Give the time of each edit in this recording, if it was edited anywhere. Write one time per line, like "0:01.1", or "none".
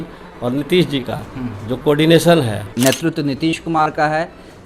0:02.6